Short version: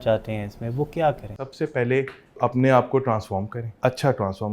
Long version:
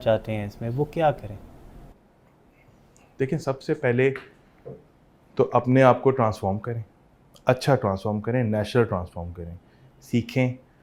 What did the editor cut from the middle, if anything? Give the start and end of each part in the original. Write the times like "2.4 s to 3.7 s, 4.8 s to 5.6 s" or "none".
1.4 s to 3.5 s, 4.5 s to 5.5 s, 6.7 s to 7.2 s